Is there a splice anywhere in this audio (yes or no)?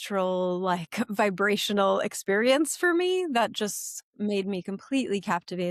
no